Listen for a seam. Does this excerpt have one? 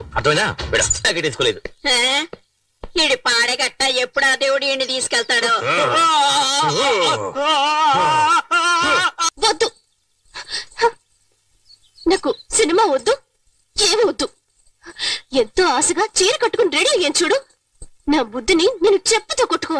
yes; 1 cut; at 9.2 s

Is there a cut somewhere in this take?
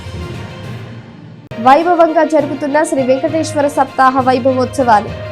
yes; 1 cut; at 1.1 s

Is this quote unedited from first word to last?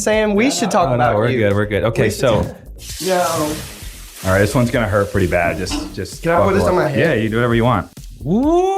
no; 2 cuts; at 2.8 s, 7.9 s

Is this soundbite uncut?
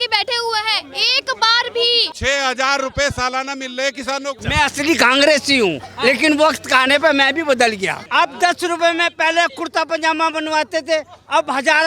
no; 3 cuts; at 2.1 s, 4.4 s, 8.0 s

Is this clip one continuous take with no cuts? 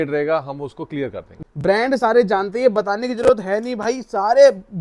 no; 1 cut; at 1.4 s

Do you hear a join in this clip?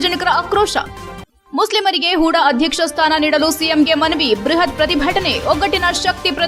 no; 0 cuts

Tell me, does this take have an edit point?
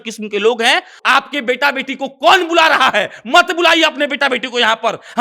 yes; 1 cut; at 1.0 s

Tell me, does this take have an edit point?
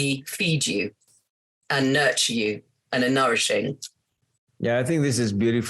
no; 0 cuts

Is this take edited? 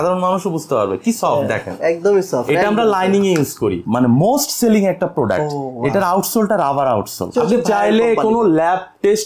yes; 2 cuts; at 3.8 s, 7.3 s

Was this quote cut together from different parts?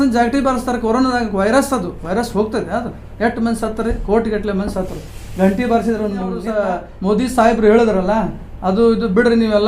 yes; 1 cut; at 6.5 s

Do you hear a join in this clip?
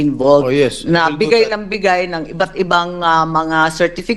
no; 0 cuts

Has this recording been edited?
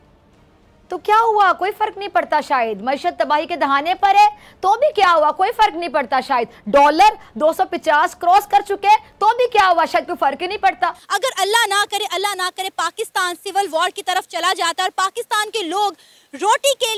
yes; 1 cut; at 11.0 s

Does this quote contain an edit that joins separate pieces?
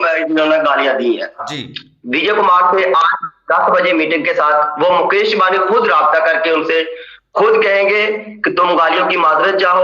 yes; 1 cut; at 1.5 s

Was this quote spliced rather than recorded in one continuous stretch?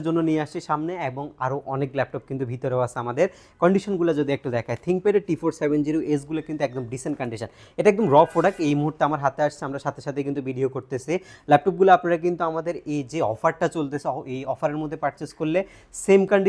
no; 0 cuts

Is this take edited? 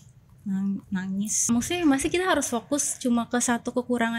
yes; 1 cut; at 1.4 s

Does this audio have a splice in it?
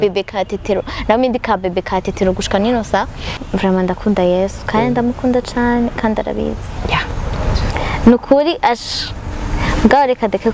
yes; 1 cut; at 3.3 s

